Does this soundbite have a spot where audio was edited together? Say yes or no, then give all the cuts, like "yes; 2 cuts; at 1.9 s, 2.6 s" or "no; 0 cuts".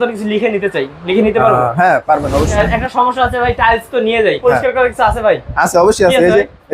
yes; 2 cuts; at 2.5 s, 4.4 s